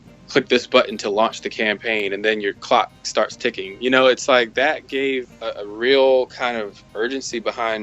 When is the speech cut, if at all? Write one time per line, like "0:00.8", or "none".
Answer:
0:05.4